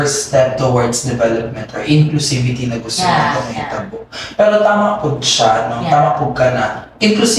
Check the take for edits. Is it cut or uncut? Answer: uncut